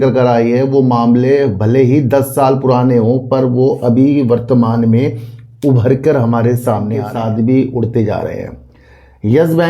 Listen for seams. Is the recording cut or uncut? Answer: cut